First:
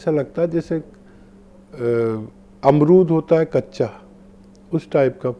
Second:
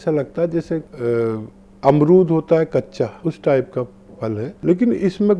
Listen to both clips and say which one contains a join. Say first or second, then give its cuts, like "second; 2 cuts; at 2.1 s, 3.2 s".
second; 3 cuts; at 0.9 s, 3.2 s, 4.5 s